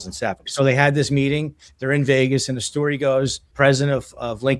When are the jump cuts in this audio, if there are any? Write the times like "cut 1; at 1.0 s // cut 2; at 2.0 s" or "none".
cut 1; at 3.4 s

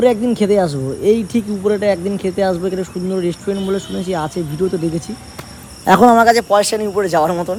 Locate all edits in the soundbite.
none

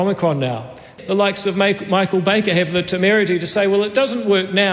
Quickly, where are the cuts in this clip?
cut 1; at 0.9 s

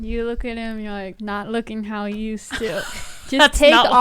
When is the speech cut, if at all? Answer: cut 1; at 1.1 s

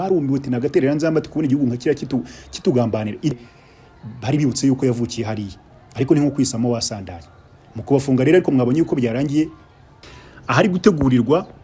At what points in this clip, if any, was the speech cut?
cut 1; at 3.3 s // cut 2; at 10.1 s

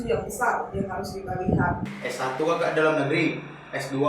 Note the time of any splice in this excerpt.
cut 1; at 1.8 s

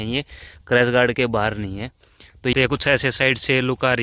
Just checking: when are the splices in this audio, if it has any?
cut 1; at 2.5 s

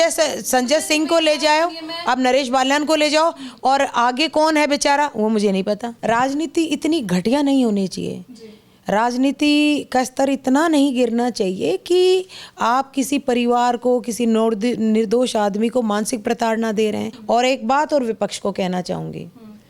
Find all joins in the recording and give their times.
cut 1; at 5.9 s // cut 2; at 17.1 s

